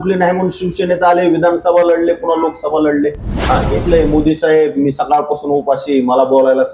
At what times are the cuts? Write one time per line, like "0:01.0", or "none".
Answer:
0:03.7